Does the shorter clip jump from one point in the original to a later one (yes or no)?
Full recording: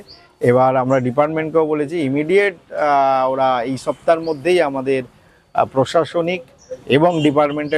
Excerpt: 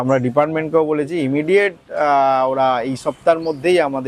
no